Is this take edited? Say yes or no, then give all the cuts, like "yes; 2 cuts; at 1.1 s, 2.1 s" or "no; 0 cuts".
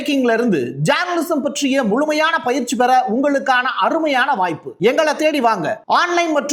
no; 0 cuts